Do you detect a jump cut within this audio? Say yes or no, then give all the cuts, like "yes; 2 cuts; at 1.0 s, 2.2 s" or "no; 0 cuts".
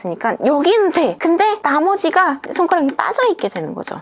yes; 1 cut; at 1.5 s